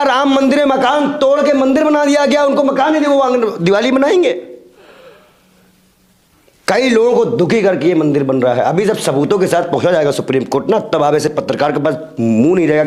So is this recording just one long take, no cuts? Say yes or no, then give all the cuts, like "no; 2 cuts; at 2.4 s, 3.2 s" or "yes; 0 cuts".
yes; 0 cuts